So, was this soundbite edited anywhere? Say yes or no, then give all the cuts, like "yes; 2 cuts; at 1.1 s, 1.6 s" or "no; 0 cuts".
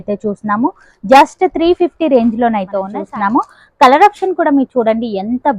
yes; 1 cut; at 2.9 s